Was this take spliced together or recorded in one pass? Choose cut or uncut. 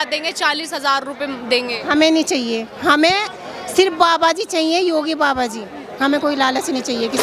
uncut